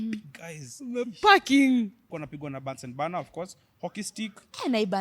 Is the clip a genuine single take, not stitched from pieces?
no; 1 cut; at 2.0 s

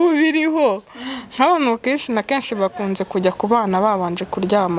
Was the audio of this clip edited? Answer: no; 0 cuts

